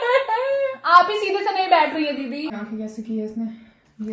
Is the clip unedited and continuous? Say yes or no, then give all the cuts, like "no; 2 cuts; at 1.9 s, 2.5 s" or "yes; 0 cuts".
no; 1 cut; at 2.5 s